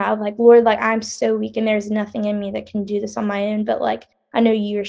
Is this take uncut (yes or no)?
yes